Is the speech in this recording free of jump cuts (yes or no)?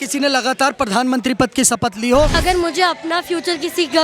no